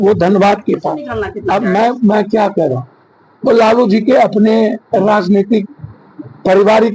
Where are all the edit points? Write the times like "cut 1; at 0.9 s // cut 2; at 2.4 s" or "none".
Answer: cut 1; at 1.3 s